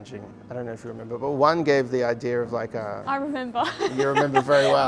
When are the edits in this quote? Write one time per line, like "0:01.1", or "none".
none